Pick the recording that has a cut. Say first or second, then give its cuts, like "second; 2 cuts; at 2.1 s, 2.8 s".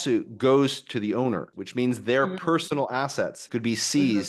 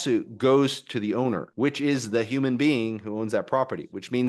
first; 1 cut; at 1.5 s